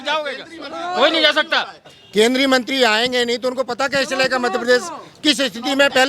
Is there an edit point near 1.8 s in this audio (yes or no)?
yes